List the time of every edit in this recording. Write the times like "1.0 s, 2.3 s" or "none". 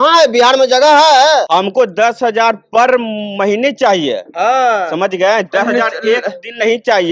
1.5 s